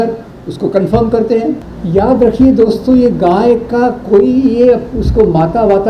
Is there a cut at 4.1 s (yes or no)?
no